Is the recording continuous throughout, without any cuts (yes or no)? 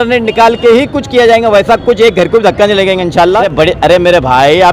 no